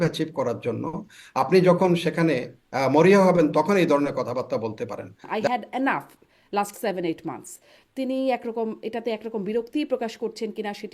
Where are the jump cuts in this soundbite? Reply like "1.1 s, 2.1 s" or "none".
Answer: 5.3 s